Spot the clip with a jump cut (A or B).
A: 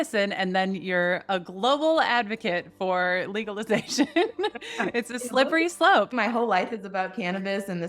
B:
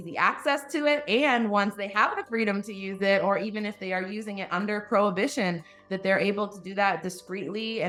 A